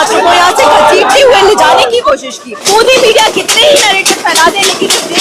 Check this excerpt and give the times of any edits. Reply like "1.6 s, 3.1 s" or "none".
2.5 s